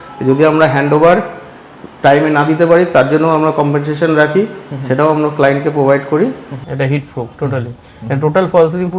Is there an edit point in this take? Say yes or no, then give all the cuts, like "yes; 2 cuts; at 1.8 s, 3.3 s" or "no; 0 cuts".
yes; 1 cut; at 6.6 s